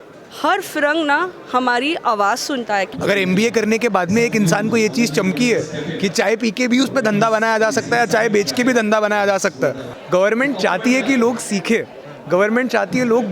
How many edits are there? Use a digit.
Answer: 2